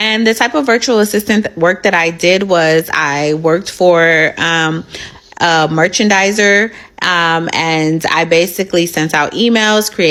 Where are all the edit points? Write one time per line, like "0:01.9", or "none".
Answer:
none